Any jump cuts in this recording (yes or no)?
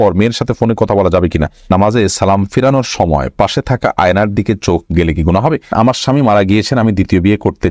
yes